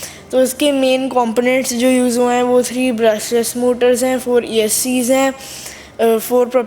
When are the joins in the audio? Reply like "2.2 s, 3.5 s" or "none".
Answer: none